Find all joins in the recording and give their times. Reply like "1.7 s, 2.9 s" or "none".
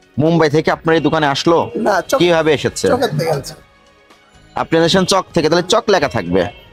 none